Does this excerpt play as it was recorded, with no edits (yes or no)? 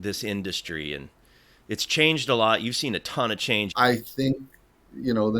no